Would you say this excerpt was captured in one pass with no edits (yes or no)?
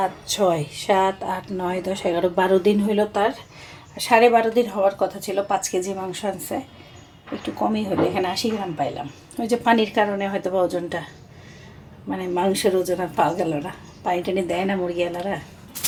yes